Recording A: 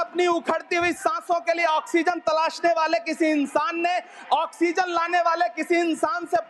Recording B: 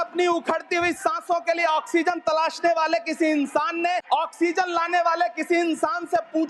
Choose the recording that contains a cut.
B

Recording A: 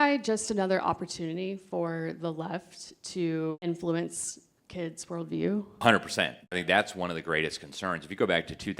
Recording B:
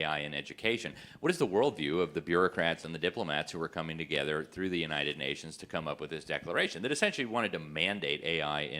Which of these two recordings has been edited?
A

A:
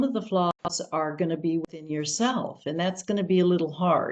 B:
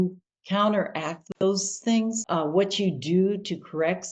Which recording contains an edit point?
B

